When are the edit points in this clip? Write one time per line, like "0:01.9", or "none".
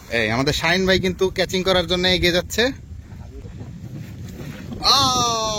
0:03.3